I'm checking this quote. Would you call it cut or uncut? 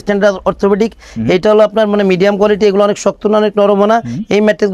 uncut